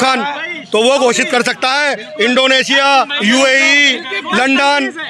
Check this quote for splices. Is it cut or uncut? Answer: uncut